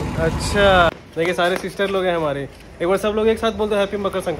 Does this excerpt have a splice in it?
yes; 1 cut; at 1.0 s

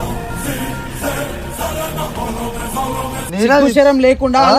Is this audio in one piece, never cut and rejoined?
no; 1 cut; at 3.2 s

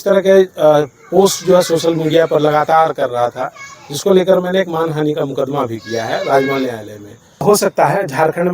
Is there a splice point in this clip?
yes; 1 cut; at 7.3 s

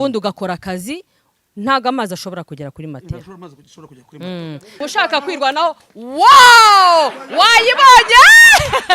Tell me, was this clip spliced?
yes; 1 cut; at 4.7 s

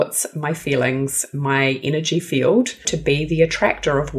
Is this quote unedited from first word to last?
no; 1 cut; at 2.9 s

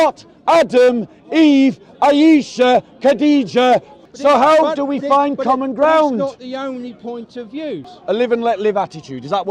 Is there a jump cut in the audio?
yes; 2 cuts; at 3.9 s, 7.8 s

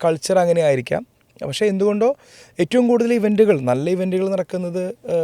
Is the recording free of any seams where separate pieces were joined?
yes; 0 cuts

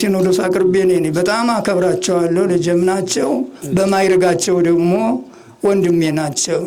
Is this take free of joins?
yes; 0 cuts

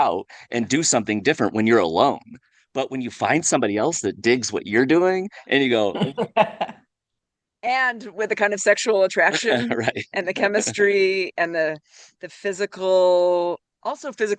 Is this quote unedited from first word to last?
yes; 0 cuts

